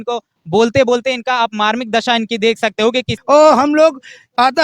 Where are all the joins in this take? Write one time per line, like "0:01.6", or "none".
0:03.1